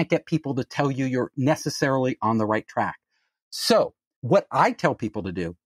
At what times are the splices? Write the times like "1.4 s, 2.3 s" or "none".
4.1 s